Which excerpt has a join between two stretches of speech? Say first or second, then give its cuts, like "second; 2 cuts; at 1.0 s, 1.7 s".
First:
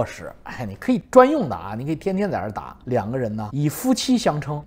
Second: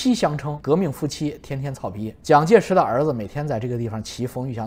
first; 1 cut; at 2.9 s